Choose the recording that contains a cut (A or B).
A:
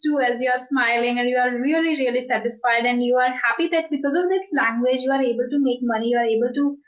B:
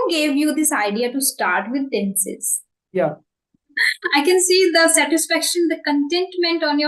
B